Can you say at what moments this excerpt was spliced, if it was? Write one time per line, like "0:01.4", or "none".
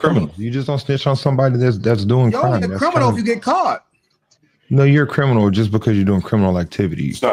none